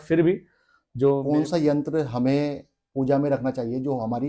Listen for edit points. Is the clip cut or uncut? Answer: cut